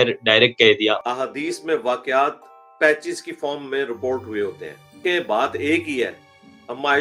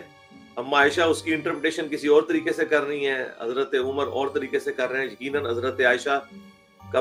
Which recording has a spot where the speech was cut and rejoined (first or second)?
first